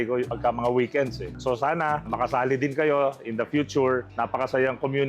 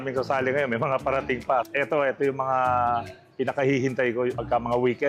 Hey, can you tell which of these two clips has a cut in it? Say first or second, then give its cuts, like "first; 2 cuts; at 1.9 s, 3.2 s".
first; 1 cut; at 4.1 s